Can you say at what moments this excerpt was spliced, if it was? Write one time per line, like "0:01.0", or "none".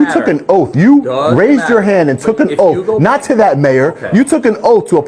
none